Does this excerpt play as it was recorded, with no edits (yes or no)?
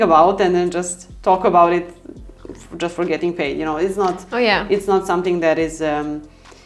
yes